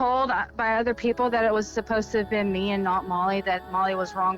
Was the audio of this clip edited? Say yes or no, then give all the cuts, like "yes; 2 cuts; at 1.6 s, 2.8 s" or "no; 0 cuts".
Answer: no; 0 cuts